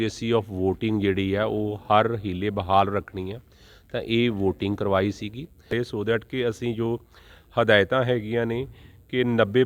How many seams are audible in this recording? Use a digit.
1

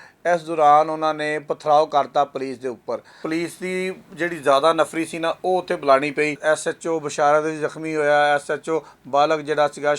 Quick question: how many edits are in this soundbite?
2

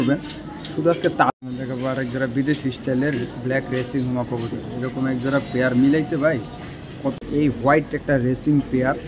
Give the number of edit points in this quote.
2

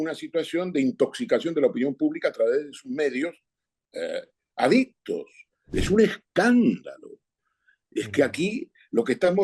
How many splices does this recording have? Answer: 1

